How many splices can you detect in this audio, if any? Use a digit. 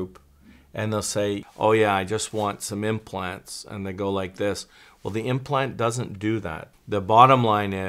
2